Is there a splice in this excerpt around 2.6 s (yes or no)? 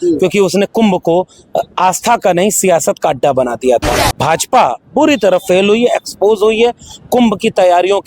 no